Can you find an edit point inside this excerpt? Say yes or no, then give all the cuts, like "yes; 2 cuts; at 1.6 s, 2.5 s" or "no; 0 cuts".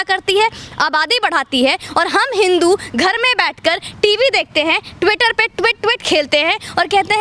no; 0 cuts